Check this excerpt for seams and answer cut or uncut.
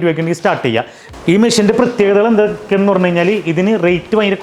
cut